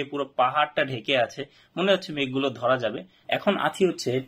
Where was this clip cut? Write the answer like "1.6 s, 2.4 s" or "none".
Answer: 3.1 s